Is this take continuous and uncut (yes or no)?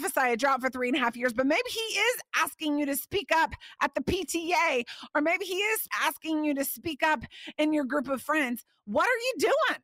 no